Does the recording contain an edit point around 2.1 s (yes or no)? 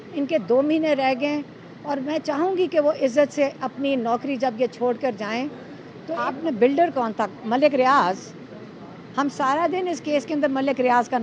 no